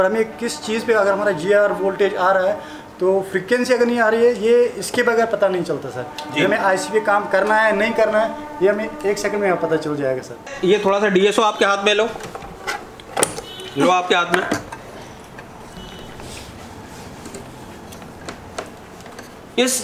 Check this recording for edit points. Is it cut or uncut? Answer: cut